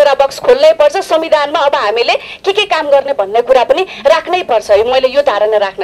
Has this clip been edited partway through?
no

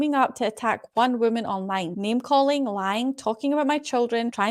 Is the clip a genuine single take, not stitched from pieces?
yes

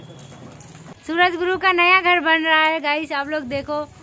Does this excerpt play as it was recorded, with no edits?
no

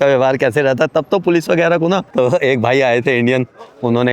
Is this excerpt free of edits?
no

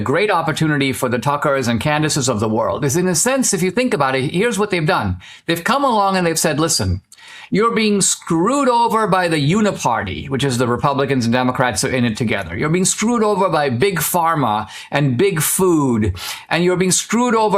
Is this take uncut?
yes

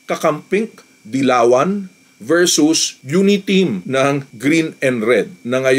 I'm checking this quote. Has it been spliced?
no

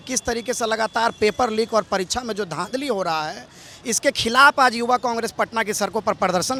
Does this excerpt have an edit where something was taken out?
no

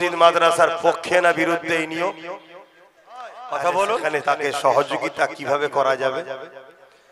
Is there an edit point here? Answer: yes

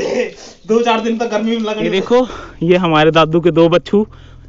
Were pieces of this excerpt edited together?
yes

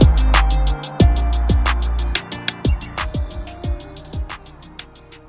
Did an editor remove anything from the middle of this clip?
no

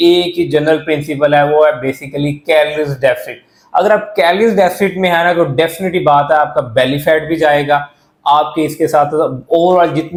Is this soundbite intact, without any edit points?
yes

